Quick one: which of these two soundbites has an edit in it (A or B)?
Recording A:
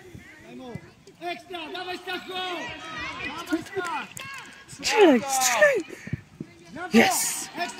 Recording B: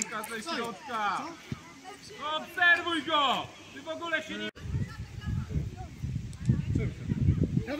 B